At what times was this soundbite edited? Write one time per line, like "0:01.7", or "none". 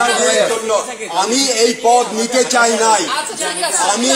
none